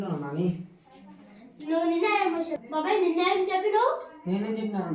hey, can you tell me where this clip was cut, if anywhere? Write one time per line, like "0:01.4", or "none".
none